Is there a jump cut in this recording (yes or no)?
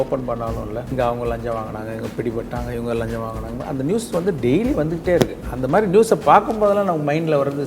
yes